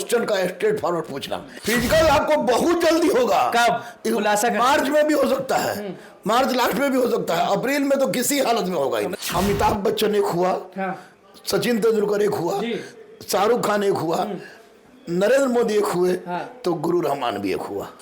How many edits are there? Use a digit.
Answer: 2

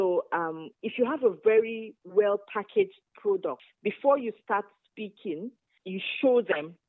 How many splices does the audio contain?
2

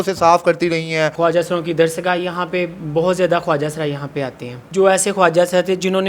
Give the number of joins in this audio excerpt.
2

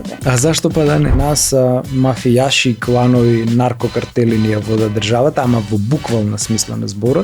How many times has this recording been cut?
1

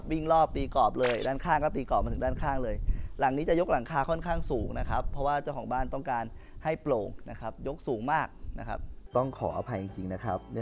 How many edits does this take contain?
1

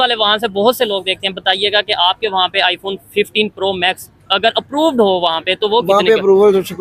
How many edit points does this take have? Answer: 0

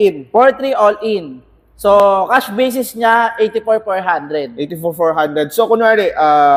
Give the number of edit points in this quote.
0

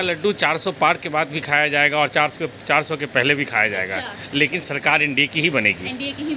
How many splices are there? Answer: 0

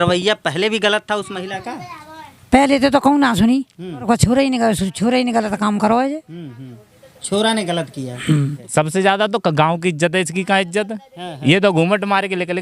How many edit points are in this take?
2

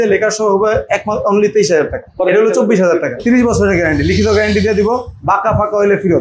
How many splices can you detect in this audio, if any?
2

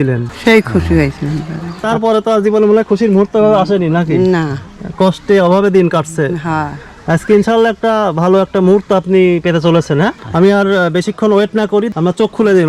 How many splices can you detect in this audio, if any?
3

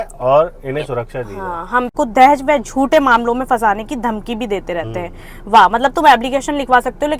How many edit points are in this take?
1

